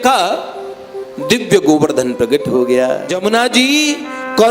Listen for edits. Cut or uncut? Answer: cut